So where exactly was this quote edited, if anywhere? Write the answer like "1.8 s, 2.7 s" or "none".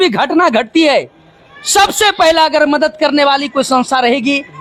none

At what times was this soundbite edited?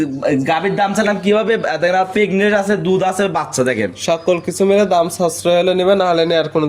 none

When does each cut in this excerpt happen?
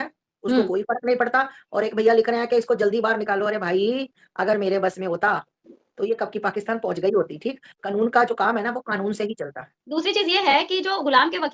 none

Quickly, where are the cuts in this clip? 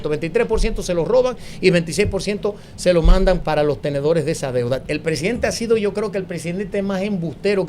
3.4 s, 4.8 s

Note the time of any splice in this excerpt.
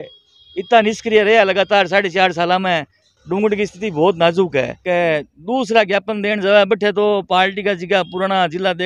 3.1 s, 4.8 s

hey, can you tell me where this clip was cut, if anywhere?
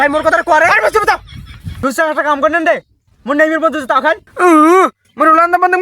1.8 s

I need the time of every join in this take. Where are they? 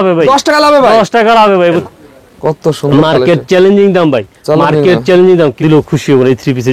1.8 s, 5.5 s

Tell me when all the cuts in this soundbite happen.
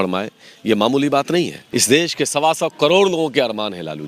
1.6 s

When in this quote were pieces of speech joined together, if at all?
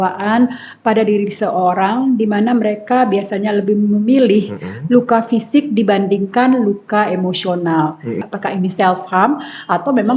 8.3 s

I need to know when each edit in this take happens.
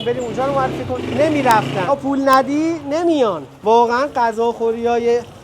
0.9 s, 1.8 s, 3.5 s

